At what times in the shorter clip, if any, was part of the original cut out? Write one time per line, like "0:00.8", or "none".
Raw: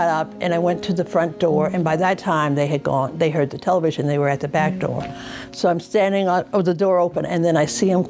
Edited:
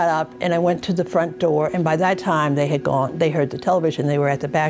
none